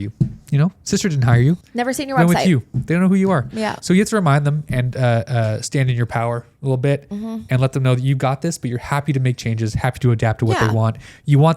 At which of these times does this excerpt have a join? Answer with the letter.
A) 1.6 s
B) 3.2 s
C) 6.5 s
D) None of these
A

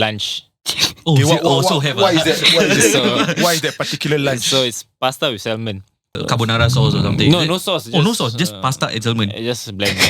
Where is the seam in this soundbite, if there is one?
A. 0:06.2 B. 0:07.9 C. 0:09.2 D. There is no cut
A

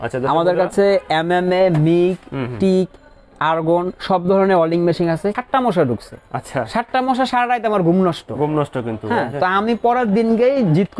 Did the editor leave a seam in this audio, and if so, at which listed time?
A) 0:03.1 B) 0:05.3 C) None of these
B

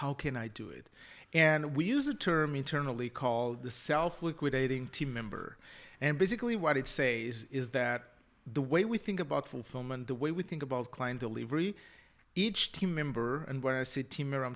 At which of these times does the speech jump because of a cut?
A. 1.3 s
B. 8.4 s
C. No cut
C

